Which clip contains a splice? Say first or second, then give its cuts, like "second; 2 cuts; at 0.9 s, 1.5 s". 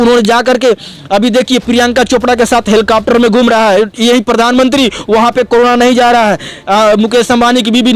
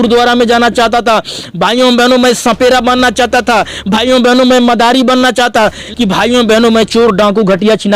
second; 1 cut; at 5.8 s